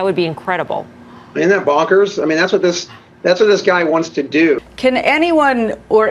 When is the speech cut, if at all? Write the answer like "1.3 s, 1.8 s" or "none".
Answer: 4.6 s